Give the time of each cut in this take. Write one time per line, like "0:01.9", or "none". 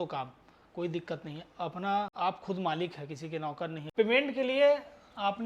0:02.1
0:03.8